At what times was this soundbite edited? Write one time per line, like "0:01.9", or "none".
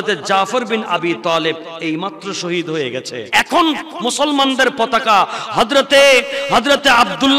0:03.3